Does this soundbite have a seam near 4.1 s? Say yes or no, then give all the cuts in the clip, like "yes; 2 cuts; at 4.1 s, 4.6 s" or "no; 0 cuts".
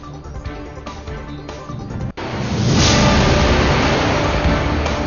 no; 1 cut; at 2.1 s